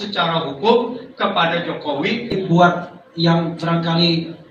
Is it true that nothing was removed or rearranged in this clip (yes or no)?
no